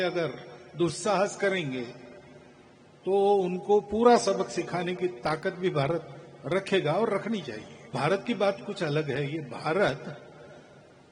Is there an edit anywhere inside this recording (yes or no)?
yes